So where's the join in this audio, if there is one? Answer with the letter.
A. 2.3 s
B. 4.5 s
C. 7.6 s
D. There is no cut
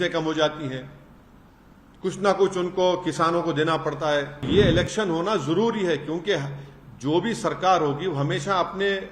B